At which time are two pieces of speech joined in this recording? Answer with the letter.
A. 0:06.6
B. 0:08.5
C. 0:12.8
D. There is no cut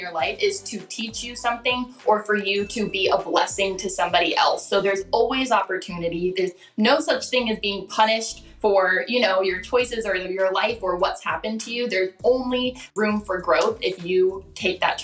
C